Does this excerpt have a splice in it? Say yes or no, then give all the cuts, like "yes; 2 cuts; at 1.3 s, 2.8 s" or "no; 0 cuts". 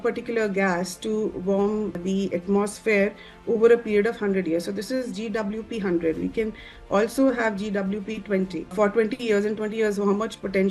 no; 0 cuts